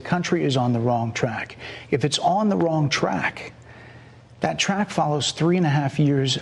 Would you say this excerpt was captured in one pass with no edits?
yes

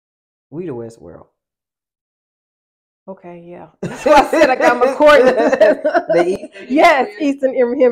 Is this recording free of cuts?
yes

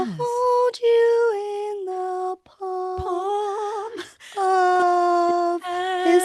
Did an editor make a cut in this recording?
no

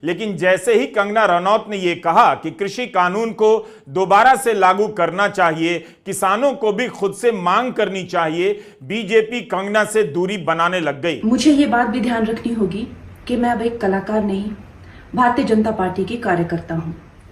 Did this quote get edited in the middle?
yes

